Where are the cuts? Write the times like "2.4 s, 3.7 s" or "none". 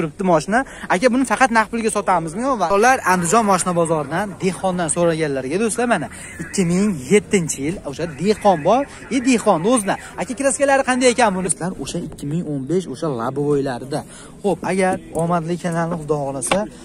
2.7 s, 11.5 s